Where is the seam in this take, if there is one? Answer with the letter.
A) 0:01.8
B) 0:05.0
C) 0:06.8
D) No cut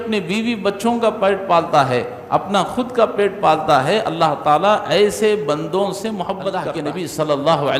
C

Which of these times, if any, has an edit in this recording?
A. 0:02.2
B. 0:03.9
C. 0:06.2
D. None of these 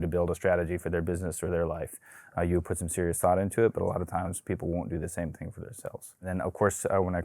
C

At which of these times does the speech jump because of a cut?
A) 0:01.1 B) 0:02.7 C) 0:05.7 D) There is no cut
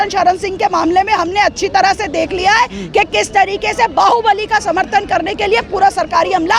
D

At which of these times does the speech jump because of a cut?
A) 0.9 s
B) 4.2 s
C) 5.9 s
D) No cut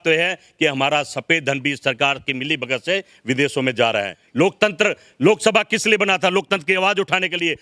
B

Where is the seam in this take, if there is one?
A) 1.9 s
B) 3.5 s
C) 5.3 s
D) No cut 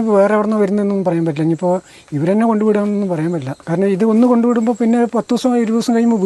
B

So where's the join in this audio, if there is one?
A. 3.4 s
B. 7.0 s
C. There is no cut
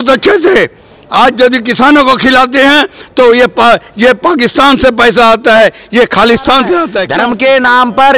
B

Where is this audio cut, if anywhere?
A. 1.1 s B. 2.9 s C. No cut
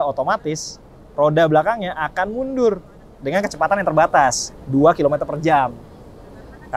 C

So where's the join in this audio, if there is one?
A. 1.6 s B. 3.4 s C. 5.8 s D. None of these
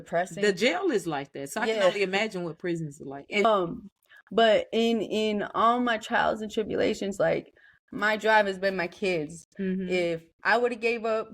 B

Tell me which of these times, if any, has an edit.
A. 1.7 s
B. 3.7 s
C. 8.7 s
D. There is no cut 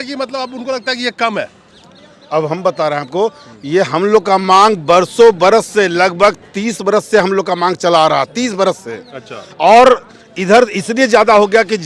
D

